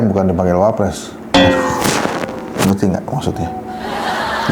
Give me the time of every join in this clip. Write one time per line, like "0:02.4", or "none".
none